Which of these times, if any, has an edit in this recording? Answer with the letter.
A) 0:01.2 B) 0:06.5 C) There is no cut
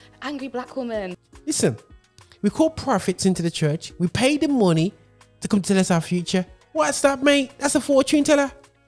A